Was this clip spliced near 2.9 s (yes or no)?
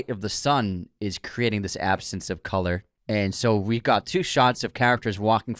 yes